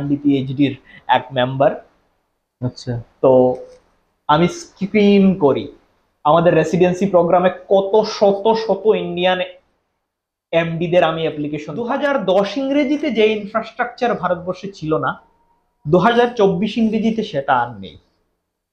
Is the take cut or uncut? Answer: cut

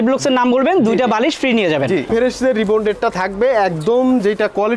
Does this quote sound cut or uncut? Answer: cut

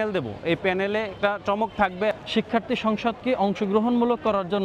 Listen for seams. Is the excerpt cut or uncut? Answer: cut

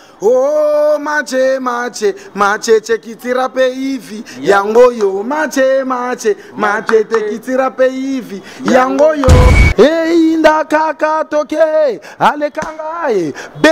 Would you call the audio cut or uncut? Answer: cut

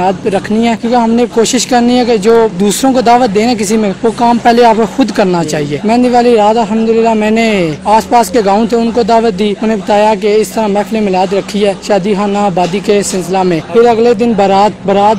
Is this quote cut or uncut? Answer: cut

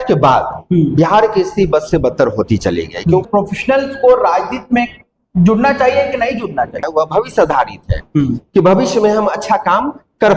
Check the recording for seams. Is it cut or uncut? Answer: cut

